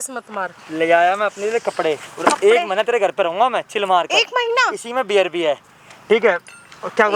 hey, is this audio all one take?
yes; 0 cuts

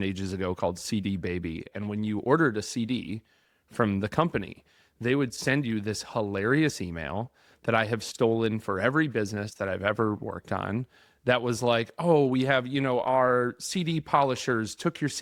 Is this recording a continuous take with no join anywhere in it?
yes; 0 cuts

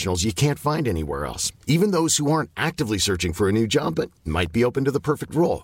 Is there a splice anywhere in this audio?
no; 0 cuts

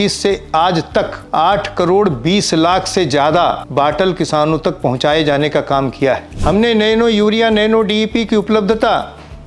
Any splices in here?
yes; 3 cuts; at 1.2 s, 3.6 s, 6.3 s

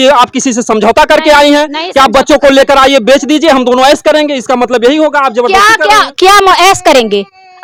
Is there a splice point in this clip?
no; 0 cuts

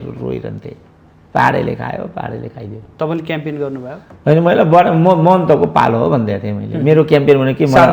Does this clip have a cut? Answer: no; 0 cuts

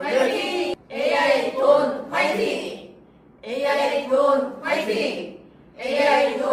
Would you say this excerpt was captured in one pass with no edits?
yes; 0 cuts

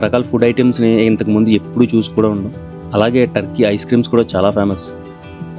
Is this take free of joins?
yes; 0 cuts

